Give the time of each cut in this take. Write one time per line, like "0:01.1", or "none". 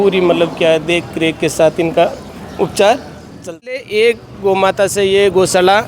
0:03.8